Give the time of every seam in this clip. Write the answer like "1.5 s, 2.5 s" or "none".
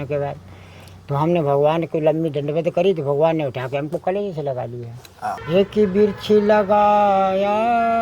5.4 s